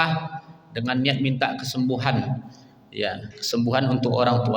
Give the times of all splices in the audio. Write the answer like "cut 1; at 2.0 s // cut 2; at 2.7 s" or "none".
none